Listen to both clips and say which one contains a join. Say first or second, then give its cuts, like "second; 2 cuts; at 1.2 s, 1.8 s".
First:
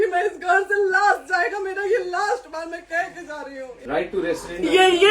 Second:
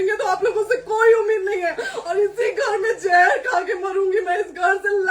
first; 1 cut; at 3.8 s